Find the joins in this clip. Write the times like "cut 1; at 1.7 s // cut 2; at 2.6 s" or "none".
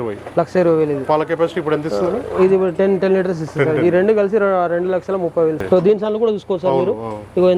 cut 1; at 5.6 s